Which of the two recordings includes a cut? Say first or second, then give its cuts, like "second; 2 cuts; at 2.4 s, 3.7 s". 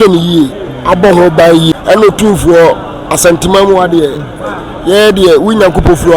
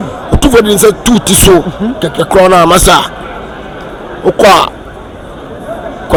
first; 1 cut; at 1.7 s